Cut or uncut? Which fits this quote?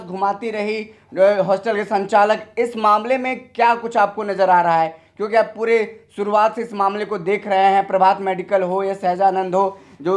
uncut